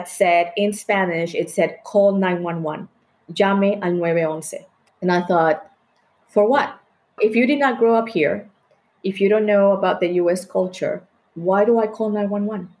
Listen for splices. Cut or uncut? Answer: uncut